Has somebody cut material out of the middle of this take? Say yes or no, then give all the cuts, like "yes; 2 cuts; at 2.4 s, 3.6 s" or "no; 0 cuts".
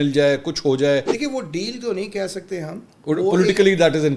yes; 1 cut; at 1.1 s